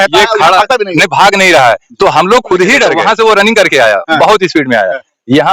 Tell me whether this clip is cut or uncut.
cut